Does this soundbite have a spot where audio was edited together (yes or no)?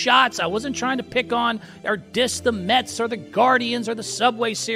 no